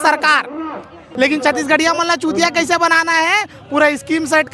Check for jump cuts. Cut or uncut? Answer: cut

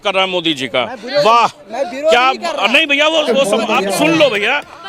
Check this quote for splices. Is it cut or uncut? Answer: uncut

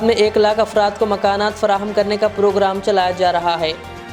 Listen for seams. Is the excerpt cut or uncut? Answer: uncut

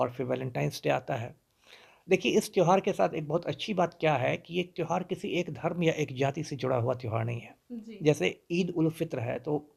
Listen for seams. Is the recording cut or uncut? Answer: uncut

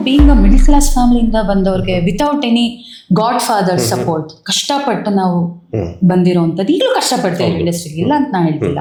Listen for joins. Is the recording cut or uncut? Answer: uncut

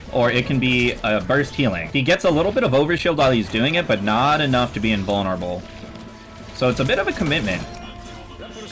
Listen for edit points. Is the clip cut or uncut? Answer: cut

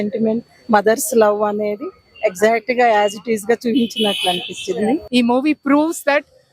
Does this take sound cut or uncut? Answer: cut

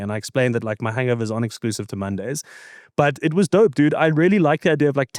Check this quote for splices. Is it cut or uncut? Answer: uncut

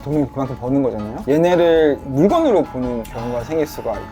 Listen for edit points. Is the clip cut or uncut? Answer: cut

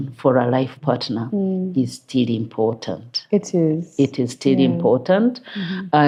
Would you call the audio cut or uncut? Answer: uncut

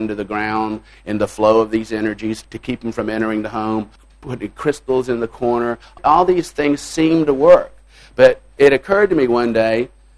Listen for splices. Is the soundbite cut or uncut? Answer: cut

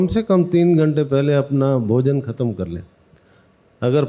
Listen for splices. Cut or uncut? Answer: uncut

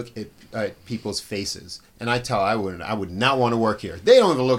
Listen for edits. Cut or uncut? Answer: uncut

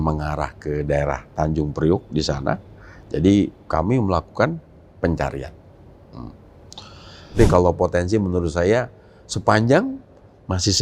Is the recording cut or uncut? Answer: cut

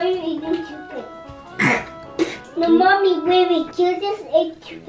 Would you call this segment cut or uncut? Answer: cut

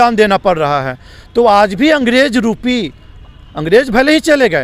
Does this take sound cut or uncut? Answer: uncut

